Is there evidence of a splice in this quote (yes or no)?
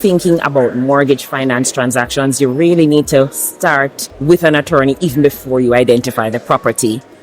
yes